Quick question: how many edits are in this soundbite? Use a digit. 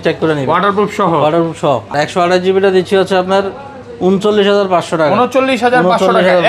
1